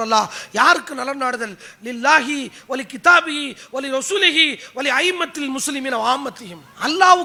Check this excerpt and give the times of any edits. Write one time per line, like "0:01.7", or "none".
none